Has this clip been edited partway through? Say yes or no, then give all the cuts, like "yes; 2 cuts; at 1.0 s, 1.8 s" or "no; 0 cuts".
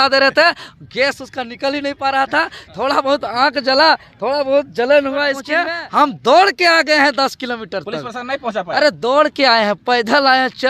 yes; 1 cut; at 5.5 s